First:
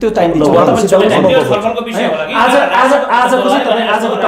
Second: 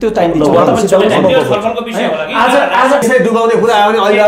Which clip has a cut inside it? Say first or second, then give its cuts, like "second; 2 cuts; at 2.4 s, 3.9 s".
second; 1 cut; at 3.0 s